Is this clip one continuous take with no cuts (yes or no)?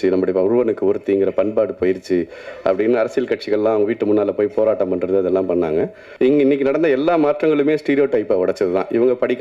no